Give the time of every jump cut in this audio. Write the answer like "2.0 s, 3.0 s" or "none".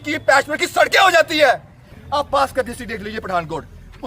1.9 s